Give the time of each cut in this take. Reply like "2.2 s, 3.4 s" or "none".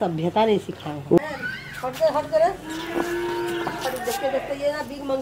1.2 s